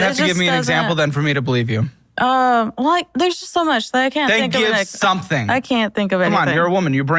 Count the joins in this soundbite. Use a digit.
2